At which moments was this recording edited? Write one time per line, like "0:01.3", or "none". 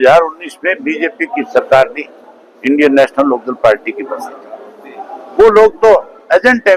none